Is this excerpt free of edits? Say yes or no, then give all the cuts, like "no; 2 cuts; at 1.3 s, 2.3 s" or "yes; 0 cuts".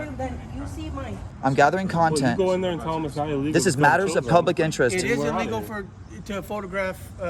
no; 1 cut; at 1.2 s